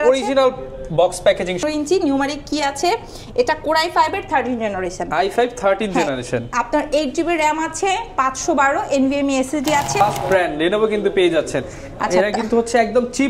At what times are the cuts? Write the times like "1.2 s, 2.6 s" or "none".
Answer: 1.6 s, 10.0 s